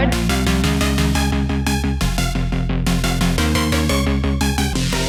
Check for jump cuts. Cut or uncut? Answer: uncut